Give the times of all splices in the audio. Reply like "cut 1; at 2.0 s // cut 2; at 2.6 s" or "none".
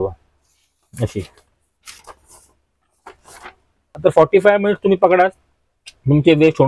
cut 1; at 4.0 s